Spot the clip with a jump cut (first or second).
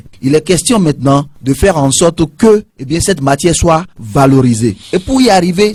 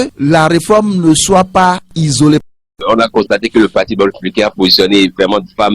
second